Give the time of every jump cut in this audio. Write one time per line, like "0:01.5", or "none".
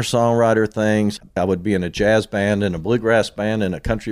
0:01.3